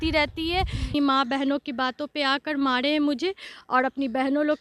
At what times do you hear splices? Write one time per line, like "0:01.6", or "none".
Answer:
0:00.9

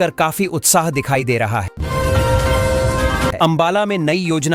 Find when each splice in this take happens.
0:01.7
0:03.3

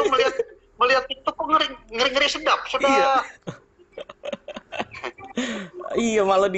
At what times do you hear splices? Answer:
0:03.6

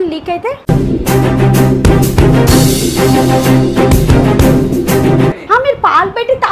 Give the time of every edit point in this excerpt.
0:05.4

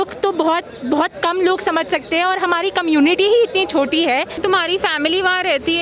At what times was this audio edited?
0:04.4

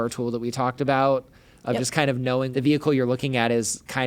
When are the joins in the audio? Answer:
0:02.5

